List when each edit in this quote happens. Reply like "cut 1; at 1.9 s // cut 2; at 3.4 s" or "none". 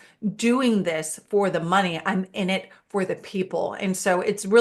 none